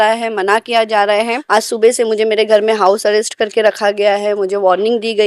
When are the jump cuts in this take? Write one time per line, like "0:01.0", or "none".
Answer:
0:01.4